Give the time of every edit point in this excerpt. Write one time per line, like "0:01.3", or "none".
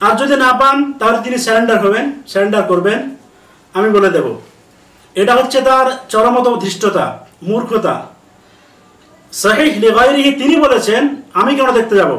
0:09.3

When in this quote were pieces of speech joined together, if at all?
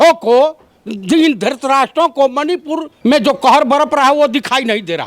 0:02.9

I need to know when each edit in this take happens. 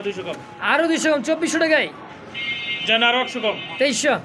none

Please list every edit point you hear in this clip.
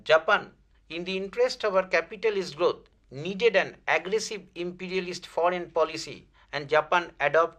0:05.7

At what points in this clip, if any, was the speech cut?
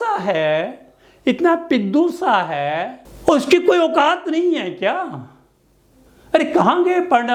none

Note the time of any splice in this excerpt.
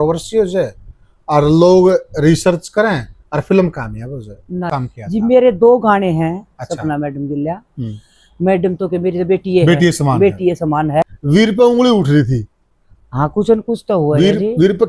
0:04.7
0:11.2

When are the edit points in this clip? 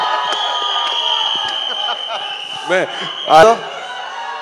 0:03.4

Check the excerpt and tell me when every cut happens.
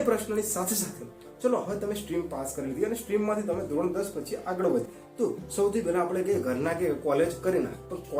0:04.8

